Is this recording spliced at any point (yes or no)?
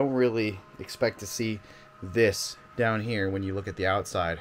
yes